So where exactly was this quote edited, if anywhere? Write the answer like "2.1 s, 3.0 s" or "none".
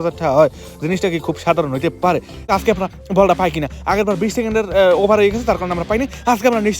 2.5 s